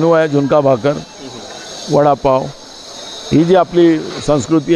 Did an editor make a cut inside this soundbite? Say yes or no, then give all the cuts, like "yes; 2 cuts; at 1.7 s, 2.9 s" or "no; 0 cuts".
no; 0 cuts